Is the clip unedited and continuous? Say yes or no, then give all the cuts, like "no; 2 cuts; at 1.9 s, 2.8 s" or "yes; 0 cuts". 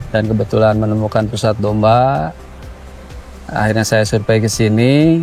yes; 0 cuts